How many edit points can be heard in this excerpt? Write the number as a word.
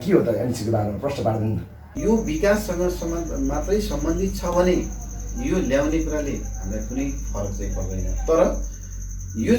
one